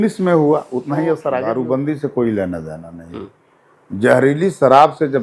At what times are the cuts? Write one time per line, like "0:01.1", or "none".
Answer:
0:01.4